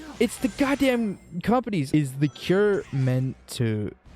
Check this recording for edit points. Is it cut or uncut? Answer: cut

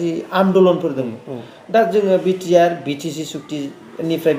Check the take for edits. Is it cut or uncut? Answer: uncut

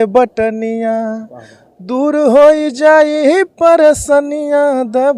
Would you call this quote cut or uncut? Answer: uncut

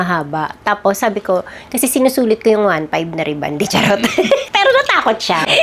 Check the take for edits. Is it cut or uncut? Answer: uncut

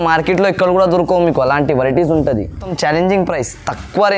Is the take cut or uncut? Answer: uncut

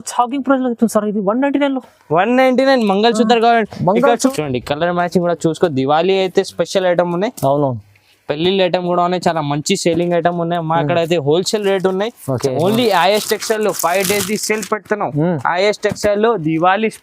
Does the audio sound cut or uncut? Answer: cut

